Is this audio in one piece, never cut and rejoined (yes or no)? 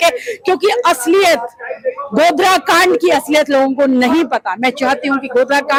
yes